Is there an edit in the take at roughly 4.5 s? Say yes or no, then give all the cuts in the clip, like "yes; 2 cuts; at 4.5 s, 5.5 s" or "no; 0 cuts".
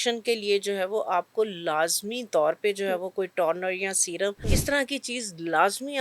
yes; 1 cut; at 4.5 s